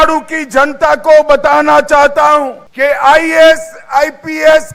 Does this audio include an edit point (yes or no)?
yes